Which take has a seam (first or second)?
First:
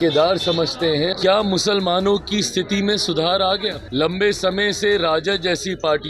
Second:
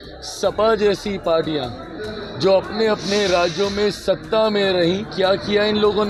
first